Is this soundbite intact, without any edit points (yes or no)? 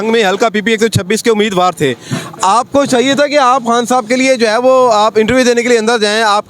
yes